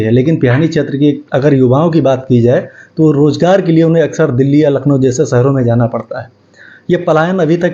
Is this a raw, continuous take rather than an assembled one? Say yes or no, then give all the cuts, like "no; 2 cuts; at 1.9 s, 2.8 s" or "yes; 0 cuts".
yes; 0 cuts